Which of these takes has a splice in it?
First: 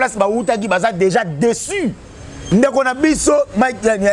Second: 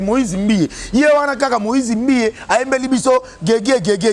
first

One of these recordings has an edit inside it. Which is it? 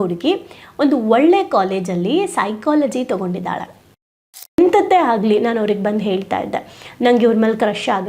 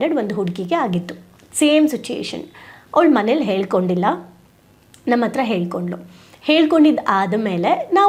first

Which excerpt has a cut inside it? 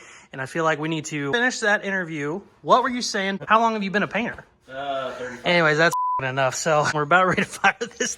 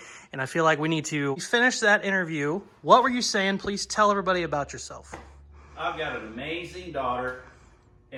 first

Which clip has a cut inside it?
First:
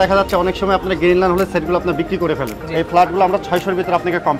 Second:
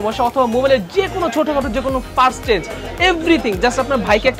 first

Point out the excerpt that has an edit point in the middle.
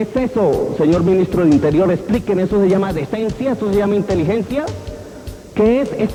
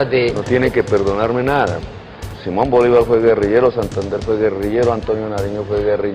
second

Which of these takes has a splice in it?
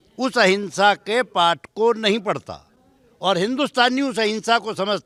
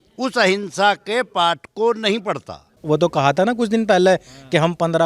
second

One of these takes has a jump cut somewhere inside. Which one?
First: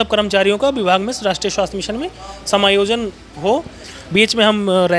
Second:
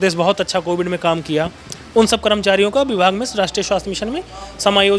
first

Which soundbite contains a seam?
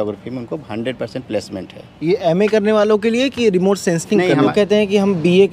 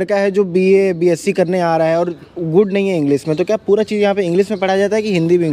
first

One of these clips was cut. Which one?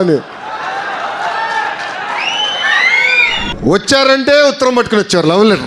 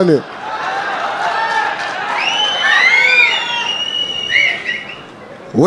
first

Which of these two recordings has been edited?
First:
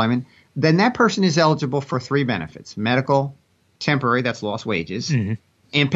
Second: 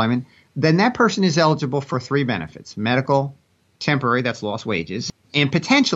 second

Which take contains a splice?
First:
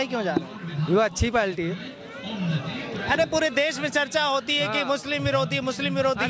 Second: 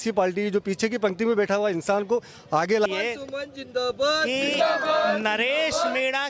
second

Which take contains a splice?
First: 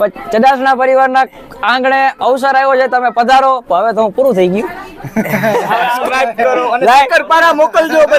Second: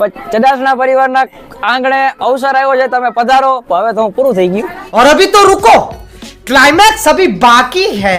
first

